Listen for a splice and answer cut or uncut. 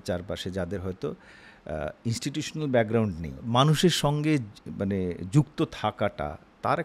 cut